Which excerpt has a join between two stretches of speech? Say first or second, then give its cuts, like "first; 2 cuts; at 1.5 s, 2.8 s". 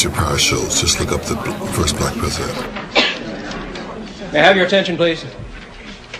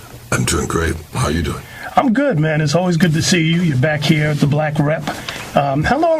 second; 1 cut; at 2.2 s